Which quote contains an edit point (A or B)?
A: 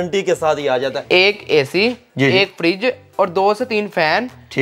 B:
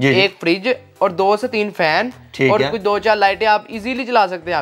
A